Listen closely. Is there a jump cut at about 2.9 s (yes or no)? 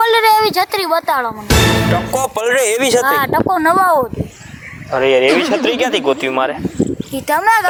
no